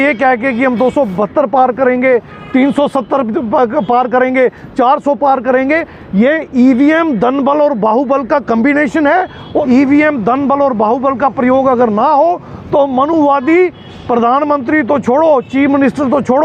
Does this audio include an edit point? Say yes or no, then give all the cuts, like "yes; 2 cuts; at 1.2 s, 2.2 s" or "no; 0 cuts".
yes; 1 cut; at 9.5 s